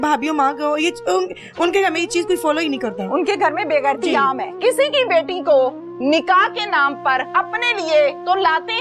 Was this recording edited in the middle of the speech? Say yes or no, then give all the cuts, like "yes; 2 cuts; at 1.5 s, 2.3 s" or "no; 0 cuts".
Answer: yes; 2 cuts; at 4.6 s, 7.3 s